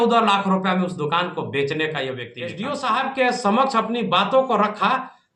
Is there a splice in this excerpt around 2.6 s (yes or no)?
yes